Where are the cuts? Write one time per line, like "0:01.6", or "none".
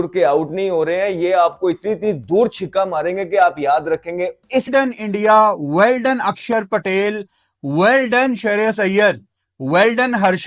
0:04.6